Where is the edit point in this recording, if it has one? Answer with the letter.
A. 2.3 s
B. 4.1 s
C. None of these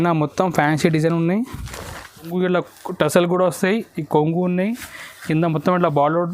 A